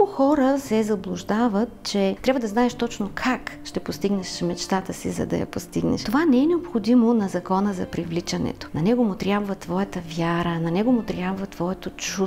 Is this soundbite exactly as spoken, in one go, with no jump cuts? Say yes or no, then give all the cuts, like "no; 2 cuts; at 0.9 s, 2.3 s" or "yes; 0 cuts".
no; 3 cuts; at 2.2 s, 6.0 s, 8.6 s